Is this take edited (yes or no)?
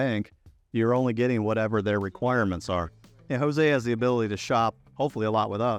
no